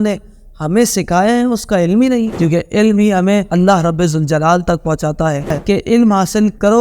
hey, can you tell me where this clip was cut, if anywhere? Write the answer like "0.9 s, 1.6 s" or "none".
2.3 s, 5.5 s